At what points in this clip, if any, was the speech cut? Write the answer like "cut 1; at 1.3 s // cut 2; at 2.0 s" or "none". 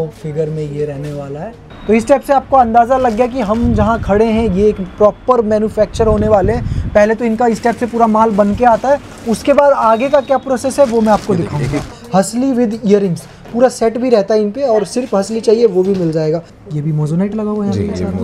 cut 1; at 1.6 s // cut 2; at 11.9 s // cut 3; at 16.5 s

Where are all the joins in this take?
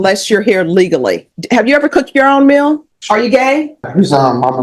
cut 1; at 1.3 s // cut 2; at 2.9 s // cut 3; at 3.9 s

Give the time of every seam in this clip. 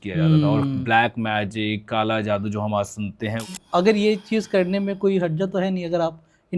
cut 1; at 3.5 s

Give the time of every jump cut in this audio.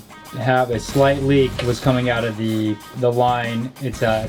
cut 1; at 1.5 s // cut 2; at 2.9 s

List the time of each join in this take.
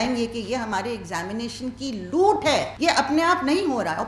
cut 1; at 2.7 s

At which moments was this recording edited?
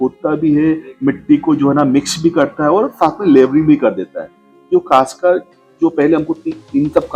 none

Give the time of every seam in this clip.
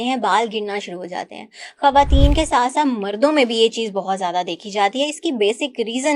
none

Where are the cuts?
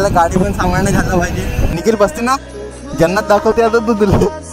cut 1; at 1.6 s

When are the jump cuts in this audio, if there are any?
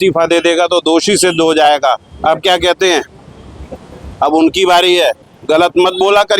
cut 1; at 5.3 s

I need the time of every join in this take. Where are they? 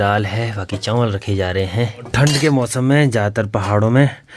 cut 1; at 2.1 s

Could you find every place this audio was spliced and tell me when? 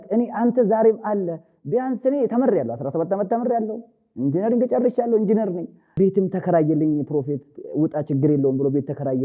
cut 1; at 5.8 s

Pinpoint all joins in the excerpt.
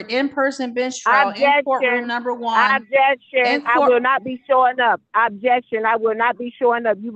none

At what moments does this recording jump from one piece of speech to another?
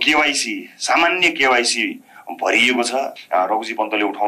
cut 1; at 3.2 s

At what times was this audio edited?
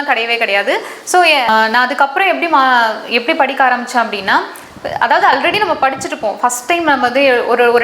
cut 1; at 1.5 s

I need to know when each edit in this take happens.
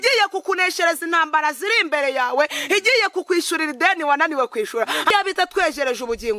cut 1; at 5.1 s

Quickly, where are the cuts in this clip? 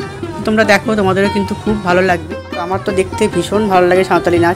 cut 1; at 2.4 s

